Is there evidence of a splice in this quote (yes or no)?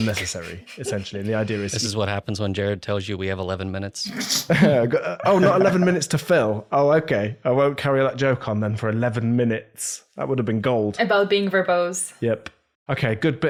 no